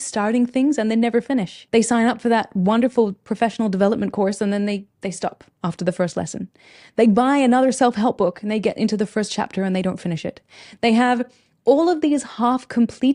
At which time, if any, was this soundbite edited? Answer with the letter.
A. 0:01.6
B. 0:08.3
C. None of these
A